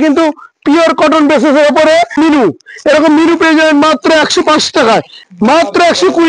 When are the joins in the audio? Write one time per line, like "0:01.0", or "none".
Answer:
0:02.2
0:05.2

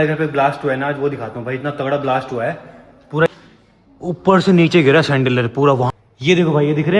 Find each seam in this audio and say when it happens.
0:03.3
0:05.9

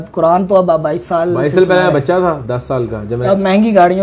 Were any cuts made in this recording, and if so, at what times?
0:03.1

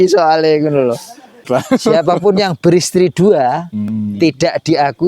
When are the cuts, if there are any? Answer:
0:01.4

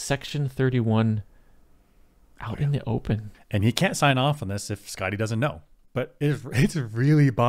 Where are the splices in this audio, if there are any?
0:03.3
0:05.7

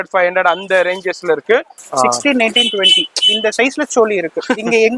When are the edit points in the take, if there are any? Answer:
0:01.8

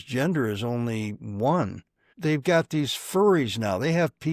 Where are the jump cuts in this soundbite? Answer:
0:02.1

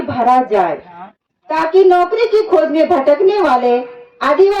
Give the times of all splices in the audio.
none

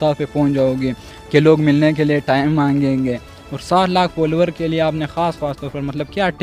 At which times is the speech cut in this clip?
none

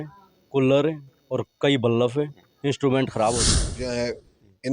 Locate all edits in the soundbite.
0:03.6

